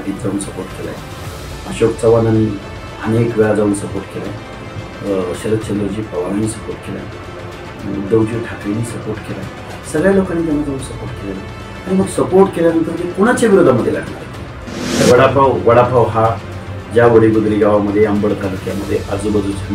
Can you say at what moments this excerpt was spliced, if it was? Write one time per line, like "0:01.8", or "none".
0:15.0